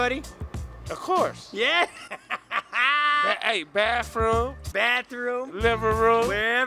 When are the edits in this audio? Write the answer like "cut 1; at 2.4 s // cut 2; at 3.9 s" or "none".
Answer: none